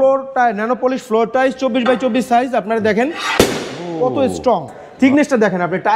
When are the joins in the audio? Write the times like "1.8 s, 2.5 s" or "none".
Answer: 4.8 s